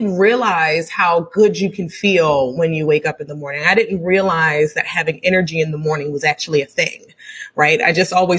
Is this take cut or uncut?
uncut